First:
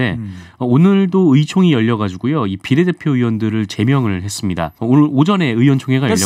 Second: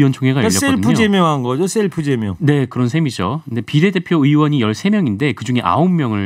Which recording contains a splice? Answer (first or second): first